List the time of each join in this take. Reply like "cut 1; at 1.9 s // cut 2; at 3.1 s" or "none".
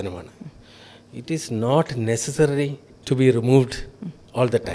cut 1; at 2.9 s